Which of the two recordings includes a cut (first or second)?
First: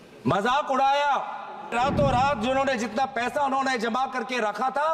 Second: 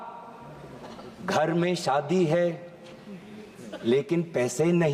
first